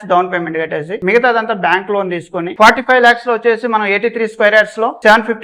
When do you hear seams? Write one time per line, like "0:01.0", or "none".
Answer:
0:00.9
0:02.5